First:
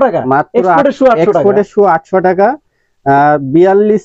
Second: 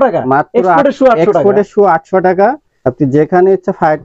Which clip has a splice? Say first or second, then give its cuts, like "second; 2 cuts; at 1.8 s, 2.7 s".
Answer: second; 1 cut; at 2.7 s